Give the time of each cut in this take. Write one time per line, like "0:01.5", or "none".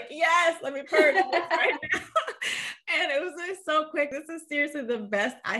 0:04.2